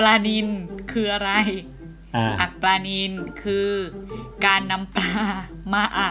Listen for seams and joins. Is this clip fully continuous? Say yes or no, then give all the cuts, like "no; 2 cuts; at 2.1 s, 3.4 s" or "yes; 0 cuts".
yes; 0 cuts